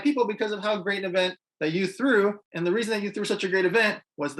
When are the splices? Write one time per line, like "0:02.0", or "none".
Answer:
0:02.5